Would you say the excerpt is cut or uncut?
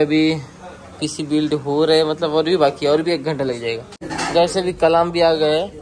uncut